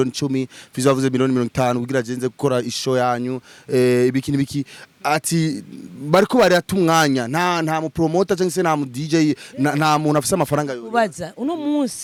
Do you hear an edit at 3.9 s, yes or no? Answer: no